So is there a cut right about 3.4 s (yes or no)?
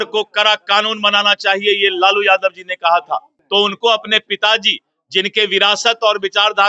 yes